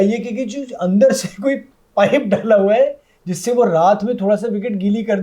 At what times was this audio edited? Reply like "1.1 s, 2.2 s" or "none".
none